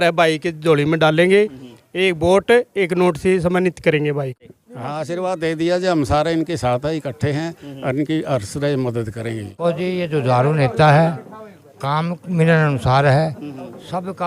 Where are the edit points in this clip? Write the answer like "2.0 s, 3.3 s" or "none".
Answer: 4.5 s, 9.6 s